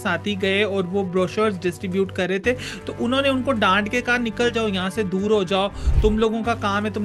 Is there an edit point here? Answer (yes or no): no